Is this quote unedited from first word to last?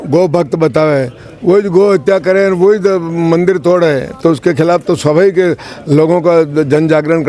yes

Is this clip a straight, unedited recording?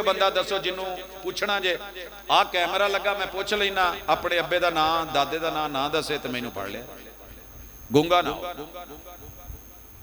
yes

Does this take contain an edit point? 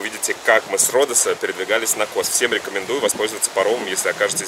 no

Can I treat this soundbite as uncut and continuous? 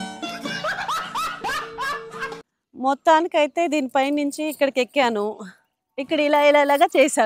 no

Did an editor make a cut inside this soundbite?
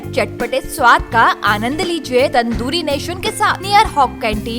yes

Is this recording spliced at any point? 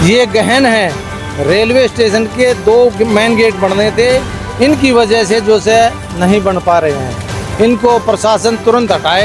no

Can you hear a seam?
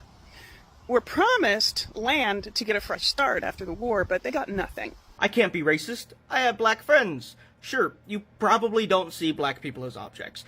yes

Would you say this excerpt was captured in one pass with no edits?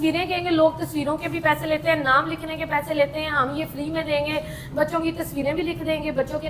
yes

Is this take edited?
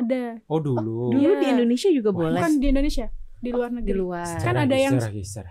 no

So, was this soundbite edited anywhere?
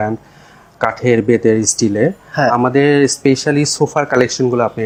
no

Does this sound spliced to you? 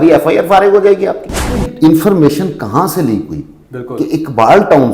yes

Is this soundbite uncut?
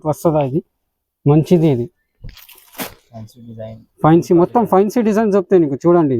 yes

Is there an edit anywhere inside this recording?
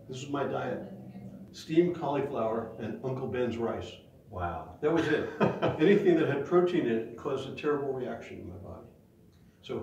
yes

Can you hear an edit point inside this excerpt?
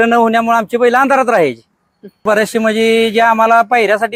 yes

